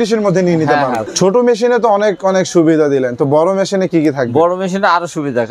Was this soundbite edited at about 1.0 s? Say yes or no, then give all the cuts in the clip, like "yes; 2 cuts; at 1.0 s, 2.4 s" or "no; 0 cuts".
yes; 1 cut; at 1.0 s